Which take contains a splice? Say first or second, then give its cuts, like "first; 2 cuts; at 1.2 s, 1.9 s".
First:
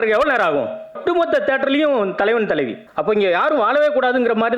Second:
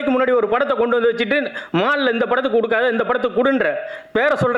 first; 2 cuts; at 1.0 s, 2.8 s